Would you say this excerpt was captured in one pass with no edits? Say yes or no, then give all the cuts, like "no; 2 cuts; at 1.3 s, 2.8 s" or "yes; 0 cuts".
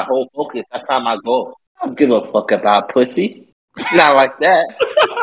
no; 1 cut; at 1.6 s